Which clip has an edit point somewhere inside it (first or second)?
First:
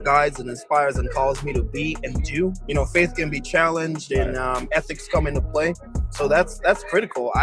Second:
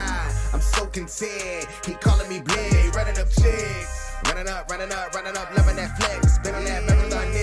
first